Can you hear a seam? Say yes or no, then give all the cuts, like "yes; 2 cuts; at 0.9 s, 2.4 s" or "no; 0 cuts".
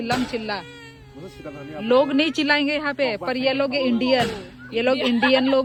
no; 0 cuts